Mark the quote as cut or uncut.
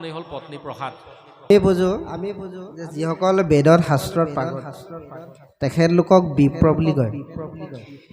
cut